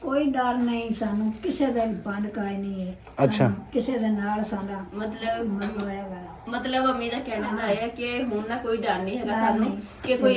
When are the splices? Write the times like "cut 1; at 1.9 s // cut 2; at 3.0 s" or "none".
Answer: none